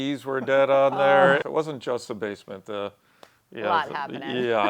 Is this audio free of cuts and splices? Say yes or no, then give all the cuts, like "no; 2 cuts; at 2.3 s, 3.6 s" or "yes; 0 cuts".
no; 1 cut; at 1.4 s